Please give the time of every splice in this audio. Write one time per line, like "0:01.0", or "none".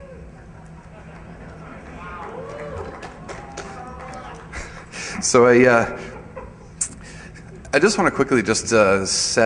0:07.0